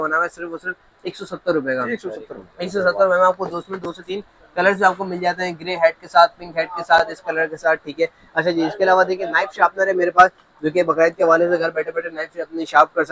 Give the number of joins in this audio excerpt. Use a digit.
0